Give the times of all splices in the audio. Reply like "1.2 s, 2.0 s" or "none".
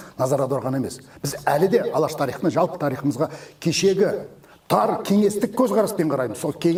none